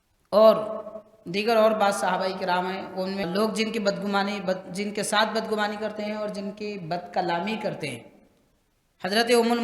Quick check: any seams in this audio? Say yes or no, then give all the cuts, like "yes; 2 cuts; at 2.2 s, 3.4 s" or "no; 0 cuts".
yes; 1 cut; at 3.2 s